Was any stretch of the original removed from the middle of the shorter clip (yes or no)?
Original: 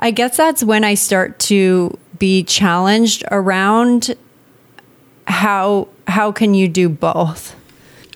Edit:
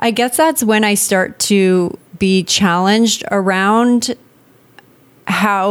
no